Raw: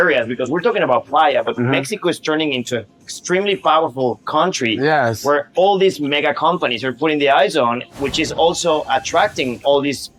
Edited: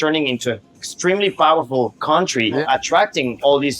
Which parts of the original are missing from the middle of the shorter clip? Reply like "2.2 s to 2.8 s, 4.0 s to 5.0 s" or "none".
4.9 s to 8.8 s